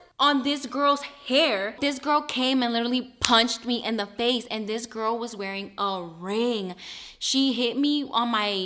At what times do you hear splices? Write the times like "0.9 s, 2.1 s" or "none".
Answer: 1.8 s